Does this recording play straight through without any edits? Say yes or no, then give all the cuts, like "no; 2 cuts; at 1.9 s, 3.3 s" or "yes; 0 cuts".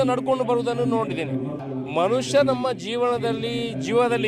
no; 1 cut; at 1.6 s